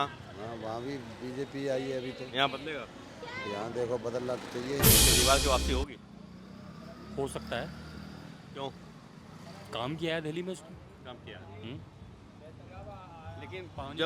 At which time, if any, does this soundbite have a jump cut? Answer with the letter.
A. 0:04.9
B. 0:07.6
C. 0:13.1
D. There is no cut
A